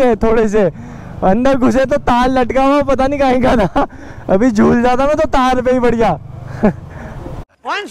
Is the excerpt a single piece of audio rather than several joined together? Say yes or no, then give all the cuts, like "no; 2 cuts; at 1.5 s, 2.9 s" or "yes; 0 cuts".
yes; 0 cuts